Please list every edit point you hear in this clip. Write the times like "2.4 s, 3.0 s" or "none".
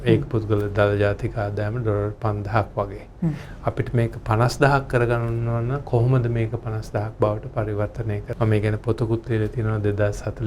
8.3 s